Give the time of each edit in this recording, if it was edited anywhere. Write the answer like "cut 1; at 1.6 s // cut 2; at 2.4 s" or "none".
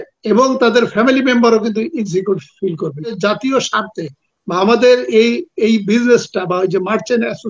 cut 1; at 3.2 s